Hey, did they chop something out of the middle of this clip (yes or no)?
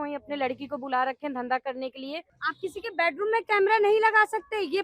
yes